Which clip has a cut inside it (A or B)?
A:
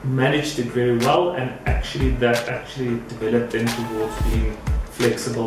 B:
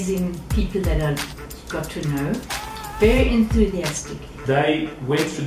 B